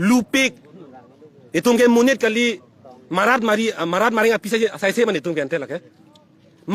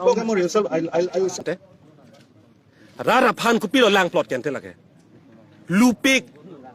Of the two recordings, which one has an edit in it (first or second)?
second